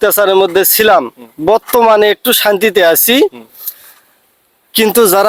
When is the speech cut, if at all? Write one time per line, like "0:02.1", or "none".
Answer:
none